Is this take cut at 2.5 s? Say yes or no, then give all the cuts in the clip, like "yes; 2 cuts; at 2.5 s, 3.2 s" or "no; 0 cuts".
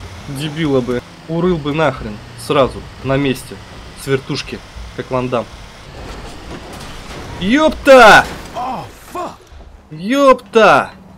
no; 3 cuts; at 1.2 s, 5.9 s, 9.4 s